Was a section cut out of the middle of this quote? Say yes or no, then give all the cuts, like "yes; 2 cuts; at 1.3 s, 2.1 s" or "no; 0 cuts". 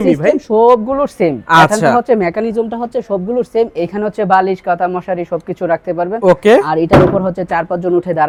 no; 0 cuts